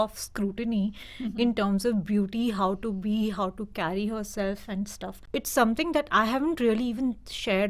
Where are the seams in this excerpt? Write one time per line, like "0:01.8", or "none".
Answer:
0:05.2